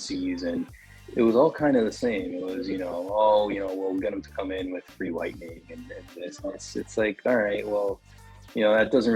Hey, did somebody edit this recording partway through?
no; 0 cuts

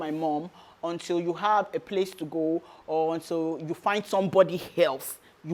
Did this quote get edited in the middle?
no; 0 cuts

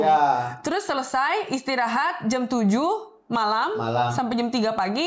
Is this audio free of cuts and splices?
yes; 0 cuts

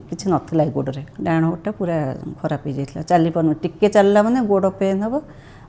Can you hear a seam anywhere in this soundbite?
yes; 1 cut; at 1.1 s

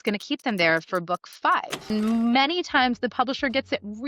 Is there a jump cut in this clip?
yes; 1 cut; at 1.9 s

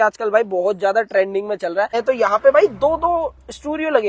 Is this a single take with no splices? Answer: no; 1 cut; at 2.0 s

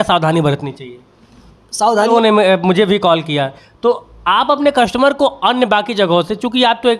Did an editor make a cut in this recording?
yes; 1 cut; at 2.1 s

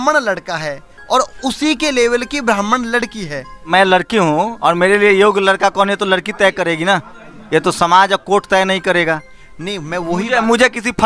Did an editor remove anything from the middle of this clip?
yes; 2 cuts; at 3.6 s, 9.3 s

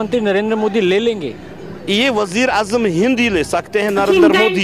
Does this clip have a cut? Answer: no; 0 cuts

